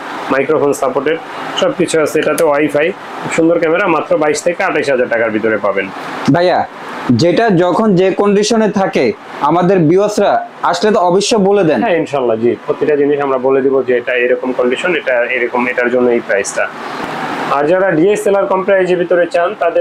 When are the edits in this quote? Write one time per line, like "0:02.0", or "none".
none